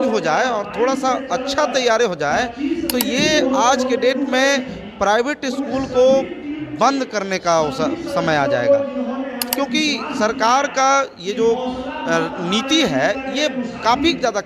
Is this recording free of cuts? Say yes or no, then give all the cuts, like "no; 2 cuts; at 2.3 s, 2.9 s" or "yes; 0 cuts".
yes; 0 cuts